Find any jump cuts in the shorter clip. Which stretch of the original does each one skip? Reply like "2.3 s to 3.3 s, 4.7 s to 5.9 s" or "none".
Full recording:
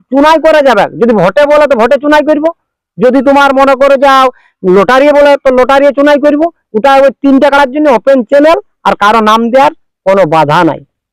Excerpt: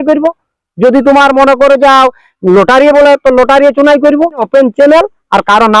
6.7 s to 8.0 s

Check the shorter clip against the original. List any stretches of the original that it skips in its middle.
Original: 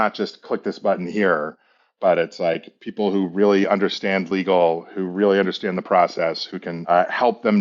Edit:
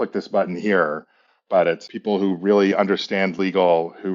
2.3 s to 2.7 s

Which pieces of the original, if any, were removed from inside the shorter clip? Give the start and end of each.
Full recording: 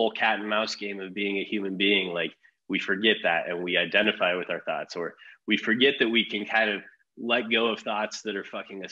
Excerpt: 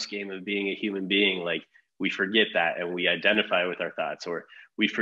none

